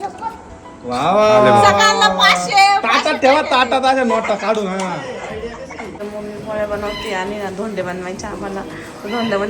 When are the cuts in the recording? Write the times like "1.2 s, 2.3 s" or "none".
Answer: 5.9 s